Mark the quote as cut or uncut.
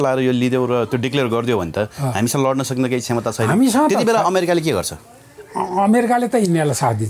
uncut